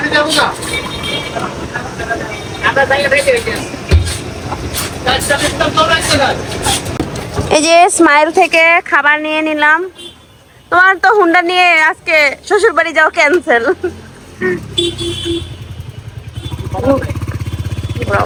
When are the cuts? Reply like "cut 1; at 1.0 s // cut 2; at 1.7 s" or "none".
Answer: none